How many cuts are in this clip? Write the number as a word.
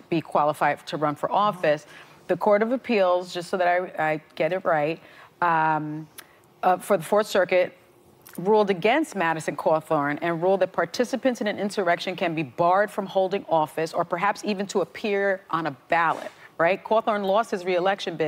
one